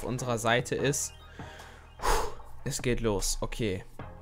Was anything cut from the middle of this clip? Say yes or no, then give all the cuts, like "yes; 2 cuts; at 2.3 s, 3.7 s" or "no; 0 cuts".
no; 0 cuts